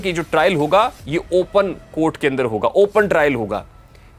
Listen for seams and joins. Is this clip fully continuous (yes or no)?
yes